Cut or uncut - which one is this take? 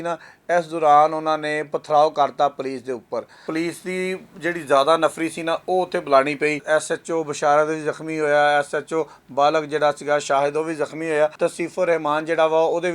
cut